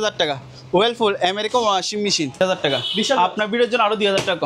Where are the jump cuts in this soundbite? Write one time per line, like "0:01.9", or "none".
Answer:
0:02.4